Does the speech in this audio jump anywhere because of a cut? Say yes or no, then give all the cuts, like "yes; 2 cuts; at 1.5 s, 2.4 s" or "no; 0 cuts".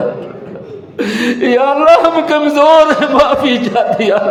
no; 0 cuts